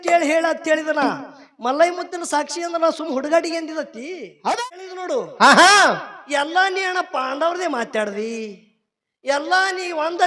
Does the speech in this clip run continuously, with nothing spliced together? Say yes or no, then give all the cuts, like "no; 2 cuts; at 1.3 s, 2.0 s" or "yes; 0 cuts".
no; 1 cut; at 4.4 s